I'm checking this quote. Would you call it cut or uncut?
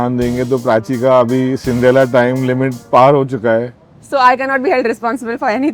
cut